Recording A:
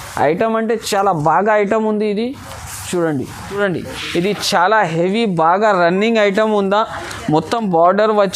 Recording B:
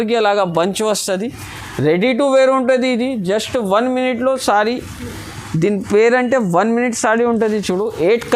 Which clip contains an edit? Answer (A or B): A